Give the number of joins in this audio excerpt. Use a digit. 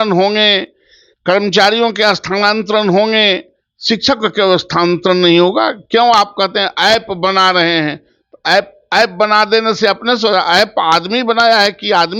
0